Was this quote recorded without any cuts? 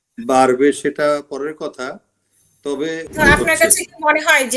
no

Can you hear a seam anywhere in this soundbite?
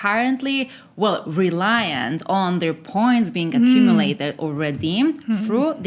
no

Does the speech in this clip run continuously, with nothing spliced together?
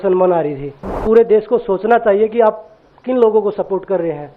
no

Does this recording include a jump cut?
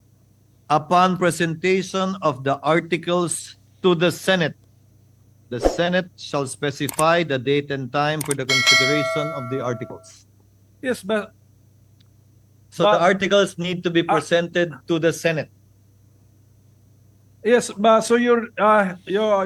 no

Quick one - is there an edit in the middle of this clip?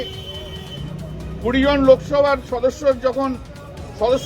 no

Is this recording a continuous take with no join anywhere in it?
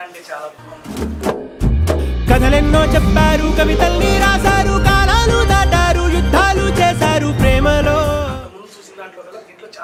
yes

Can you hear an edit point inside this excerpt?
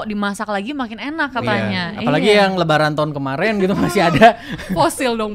no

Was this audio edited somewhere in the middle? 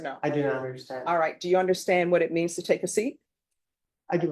no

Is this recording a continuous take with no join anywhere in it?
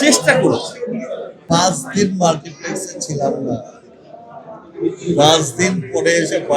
no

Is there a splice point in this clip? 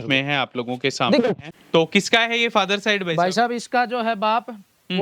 yes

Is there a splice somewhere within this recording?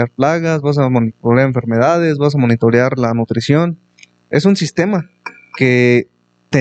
no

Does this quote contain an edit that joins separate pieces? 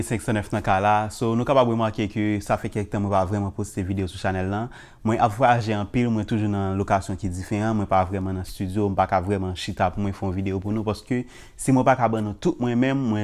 no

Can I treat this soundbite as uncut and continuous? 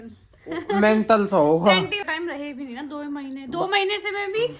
no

